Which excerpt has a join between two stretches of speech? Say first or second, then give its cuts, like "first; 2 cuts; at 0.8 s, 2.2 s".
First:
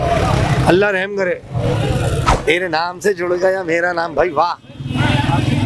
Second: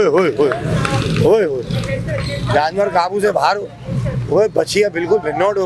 first; 1 cut; at 2.4 s